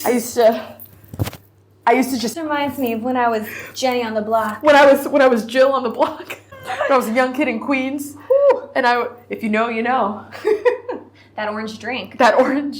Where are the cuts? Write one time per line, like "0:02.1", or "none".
0:02.4
0:06.5